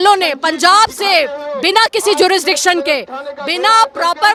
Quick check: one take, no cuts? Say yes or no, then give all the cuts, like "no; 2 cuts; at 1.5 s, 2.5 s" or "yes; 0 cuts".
yes; 0 cuts